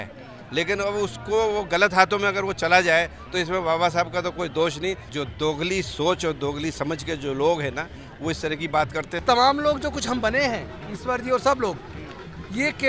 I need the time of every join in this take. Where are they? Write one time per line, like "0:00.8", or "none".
0:05.1
0:09.2